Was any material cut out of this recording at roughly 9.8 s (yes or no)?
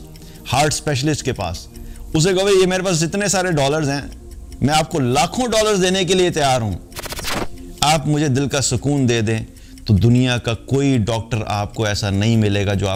no